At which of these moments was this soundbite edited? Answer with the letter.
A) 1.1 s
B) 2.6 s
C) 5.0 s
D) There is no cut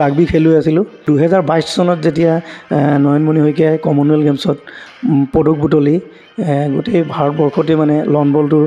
A